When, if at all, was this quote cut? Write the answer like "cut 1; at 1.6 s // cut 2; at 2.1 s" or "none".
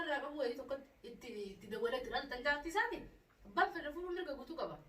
none